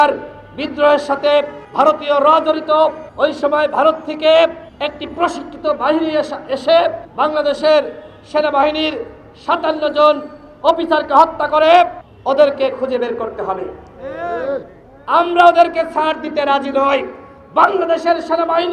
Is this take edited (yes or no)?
yes